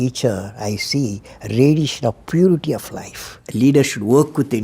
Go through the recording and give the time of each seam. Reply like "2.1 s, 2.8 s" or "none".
3.4 s